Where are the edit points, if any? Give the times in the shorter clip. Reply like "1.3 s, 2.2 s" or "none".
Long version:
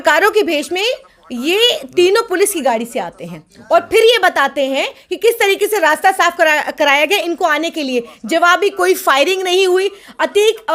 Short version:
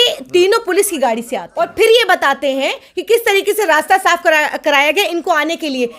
1.4 s